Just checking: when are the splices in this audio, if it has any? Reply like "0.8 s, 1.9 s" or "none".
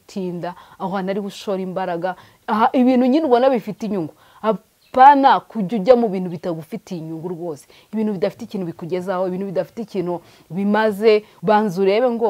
11.3 s